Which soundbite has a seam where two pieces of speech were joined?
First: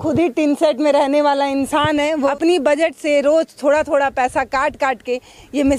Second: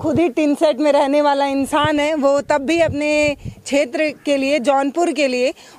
first; 1 cut; at 2.3 s

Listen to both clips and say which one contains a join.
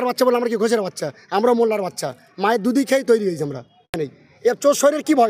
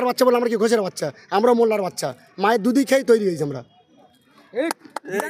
first; 1 cut; at 3.9 s

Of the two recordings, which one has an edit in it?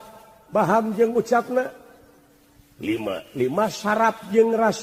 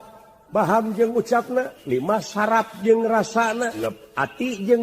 second; 2 cuts; at 1.8 s, 3.8 s

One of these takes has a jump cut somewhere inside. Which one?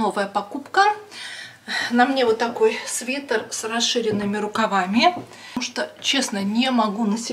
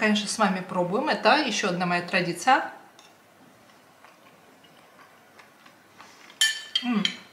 first; 1 cut; at 5.7 s

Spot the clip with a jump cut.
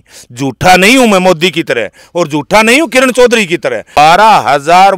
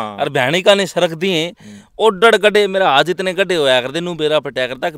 first; 1 cut; at 4.0 s

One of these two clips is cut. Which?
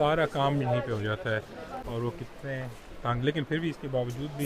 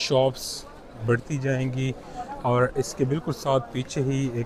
first; 1 cut; at 1.8 s

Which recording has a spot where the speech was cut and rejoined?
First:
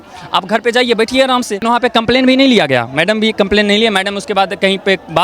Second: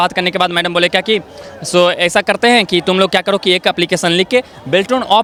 first; 1 cut; at 1.6 s

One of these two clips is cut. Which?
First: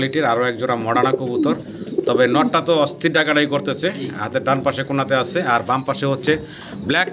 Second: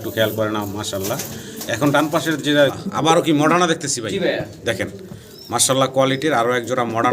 second; 1 cut; at 2.7 s

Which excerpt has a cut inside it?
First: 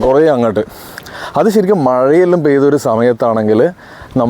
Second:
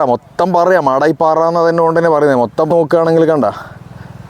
second; 1 cut; at 2.7 s

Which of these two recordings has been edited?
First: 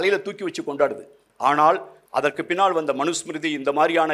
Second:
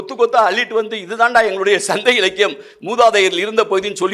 first; 2 cuts; at 1.2 s, 1.9 s

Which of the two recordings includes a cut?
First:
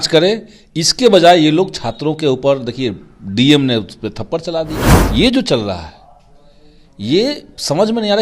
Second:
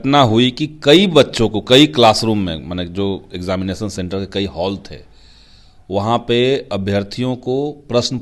first; 1 cut; at 4.9 s

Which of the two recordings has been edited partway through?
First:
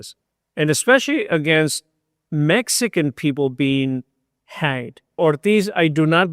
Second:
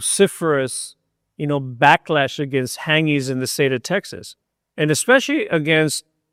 first; 1 cut; at 5.2 s

